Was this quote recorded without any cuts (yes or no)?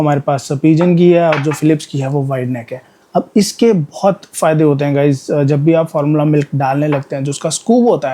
yes